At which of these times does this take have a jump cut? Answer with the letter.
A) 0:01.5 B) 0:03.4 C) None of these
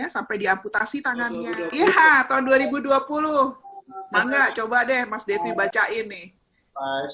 A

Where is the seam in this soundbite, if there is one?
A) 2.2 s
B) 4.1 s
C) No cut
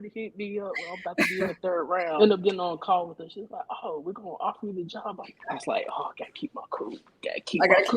A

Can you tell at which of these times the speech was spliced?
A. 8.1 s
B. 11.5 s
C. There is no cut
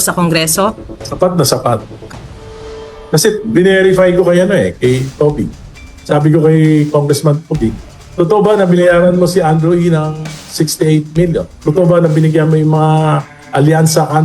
B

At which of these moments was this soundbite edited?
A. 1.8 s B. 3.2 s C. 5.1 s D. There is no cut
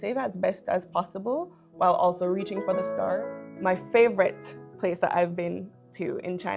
B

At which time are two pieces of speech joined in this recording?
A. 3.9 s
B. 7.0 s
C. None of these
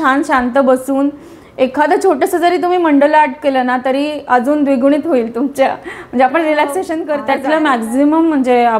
B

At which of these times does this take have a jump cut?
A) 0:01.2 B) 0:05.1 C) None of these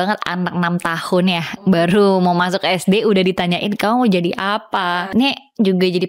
B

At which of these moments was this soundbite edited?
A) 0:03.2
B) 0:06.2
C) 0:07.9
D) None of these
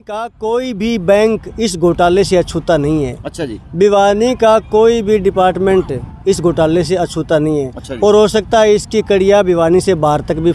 D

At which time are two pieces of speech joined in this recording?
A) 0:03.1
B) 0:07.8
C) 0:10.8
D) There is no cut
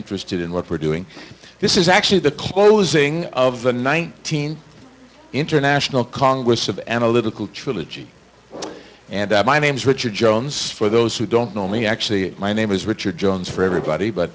B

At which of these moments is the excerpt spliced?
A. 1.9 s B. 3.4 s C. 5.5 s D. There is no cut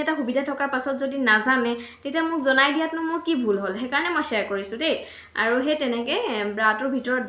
D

